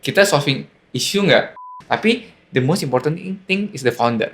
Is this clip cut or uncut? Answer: cut